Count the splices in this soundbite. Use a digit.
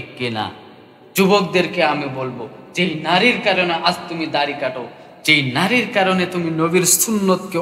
1